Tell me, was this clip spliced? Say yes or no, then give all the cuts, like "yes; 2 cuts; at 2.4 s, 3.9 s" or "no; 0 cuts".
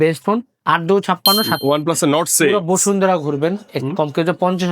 yes; 1 cut; at 1.5 s